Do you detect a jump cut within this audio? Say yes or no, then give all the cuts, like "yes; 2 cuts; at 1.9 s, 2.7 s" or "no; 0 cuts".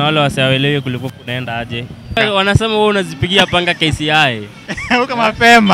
yes; 1 cut; at 2.2 s